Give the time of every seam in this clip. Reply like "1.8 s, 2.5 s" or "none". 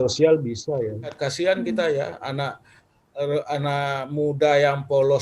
1.2 s

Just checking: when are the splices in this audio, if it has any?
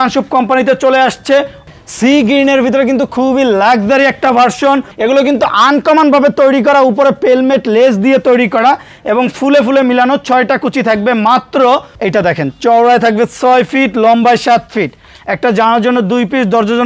1.6 s, 4.9 s, 11.9 s

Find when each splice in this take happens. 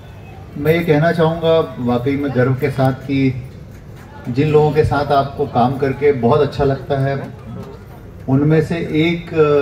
none

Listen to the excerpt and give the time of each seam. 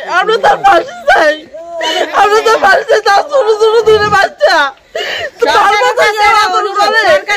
none

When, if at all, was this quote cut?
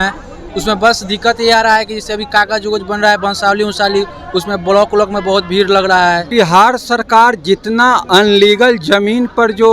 6.3 s

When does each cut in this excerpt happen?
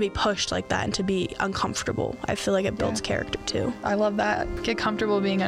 3.8 s, 4.5 s

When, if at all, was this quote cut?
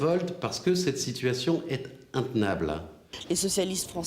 3.1 s

